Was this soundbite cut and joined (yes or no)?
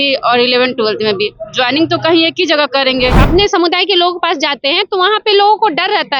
yes